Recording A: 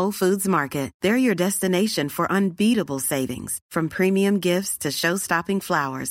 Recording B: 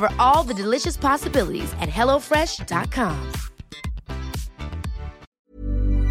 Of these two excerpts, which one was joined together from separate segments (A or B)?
B